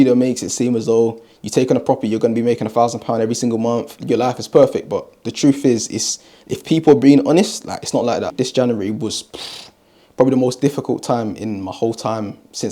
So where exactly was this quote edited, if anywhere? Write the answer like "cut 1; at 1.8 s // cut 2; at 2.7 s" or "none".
cut 1; at 3.9 s // cut 2; at 8.3 s

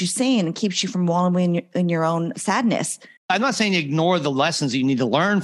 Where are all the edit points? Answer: cut 1; at 3.3 s

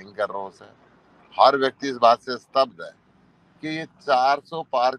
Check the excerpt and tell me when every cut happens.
none

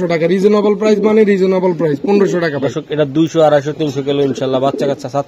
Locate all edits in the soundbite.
none

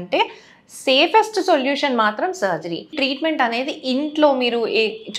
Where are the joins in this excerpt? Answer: cut 1; at 2.9 s

